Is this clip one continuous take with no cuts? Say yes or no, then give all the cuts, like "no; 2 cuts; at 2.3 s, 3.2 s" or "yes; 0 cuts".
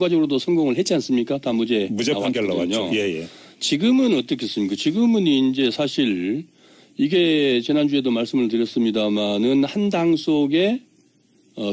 no; 1 cut; at 1.4 s